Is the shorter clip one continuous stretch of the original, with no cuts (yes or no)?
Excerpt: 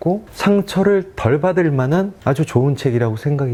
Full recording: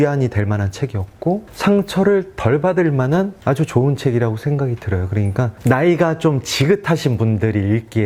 yes